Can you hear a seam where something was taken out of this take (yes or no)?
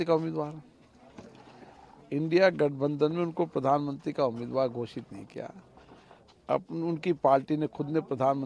no